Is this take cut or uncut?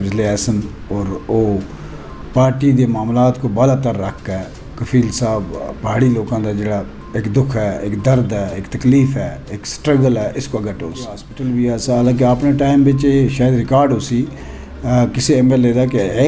cut